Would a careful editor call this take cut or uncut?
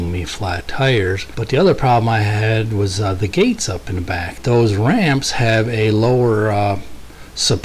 cut